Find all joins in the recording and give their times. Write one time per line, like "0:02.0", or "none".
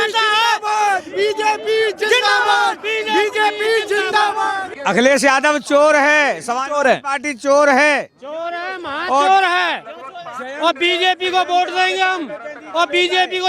0:04.7